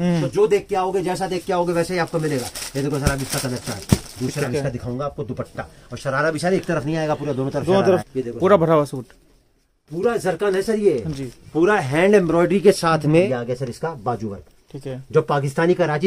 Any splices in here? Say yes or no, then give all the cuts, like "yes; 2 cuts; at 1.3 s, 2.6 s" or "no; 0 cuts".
yes; 3 cuts; at 4.4 s, 8.0 s, 13.2 s